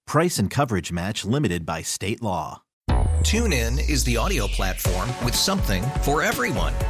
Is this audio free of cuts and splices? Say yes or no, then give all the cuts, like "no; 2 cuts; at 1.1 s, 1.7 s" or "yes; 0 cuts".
no; 1 cut; at 2.7 s